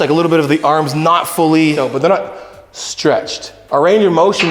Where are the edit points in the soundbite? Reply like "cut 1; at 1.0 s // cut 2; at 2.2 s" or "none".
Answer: cut 1; at 1.8 s // cut 2; at 3.5 s